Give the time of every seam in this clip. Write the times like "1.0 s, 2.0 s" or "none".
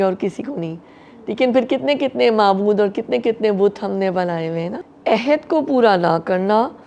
4.8 s